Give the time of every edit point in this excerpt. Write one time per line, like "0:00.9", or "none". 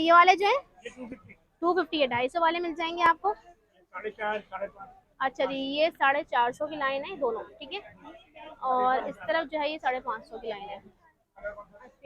none